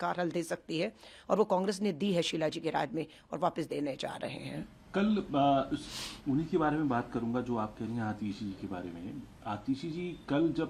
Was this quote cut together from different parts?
no; 0 cuts

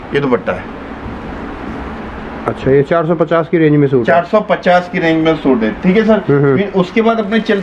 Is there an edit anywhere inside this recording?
no; 0 cuts

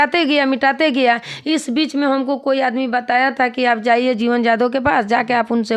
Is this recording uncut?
yes; 0 cuts

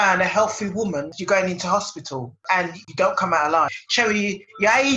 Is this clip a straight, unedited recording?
no; 2 cuts; at 1.1 s, 3.8 s

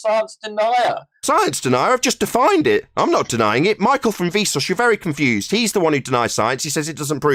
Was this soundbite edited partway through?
no; 0 cuts

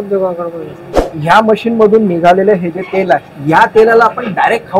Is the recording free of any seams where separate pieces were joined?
no; 2 cuts; at 1.1 s, 3.3 s

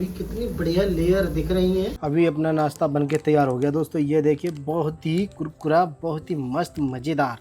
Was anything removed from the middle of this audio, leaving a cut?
yes; 1 cut; at 2.0 s

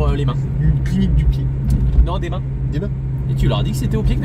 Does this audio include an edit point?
no; 0 cuts

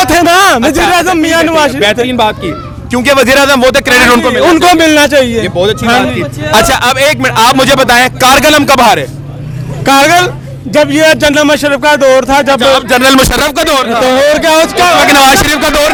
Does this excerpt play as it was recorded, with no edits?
yes; 0 cuts

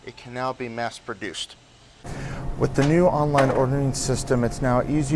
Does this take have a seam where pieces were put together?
yes; 1 cut; at 2.0 s

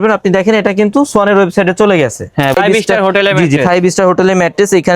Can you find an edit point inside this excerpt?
yes; 1 cut; at 2.5 s

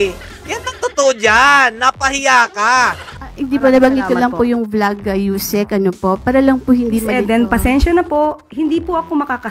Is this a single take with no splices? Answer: no; 1 cut; at 3.1 s

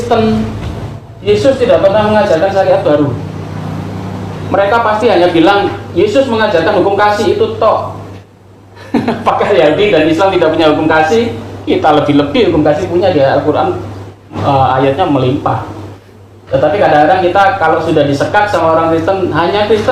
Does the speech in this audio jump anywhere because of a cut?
no; 0 cuts

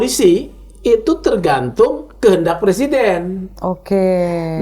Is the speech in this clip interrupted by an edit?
no; 0 cuts

